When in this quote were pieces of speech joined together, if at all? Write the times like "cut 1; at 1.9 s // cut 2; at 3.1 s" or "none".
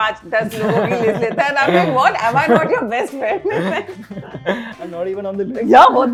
none